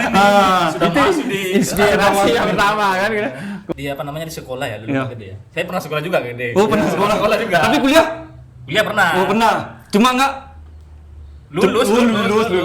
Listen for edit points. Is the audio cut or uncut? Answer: cut